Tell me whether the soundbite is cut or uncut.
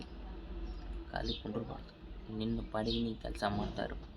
uncut